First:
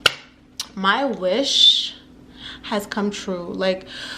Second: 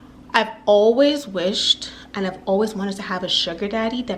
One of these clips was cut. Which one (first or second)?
first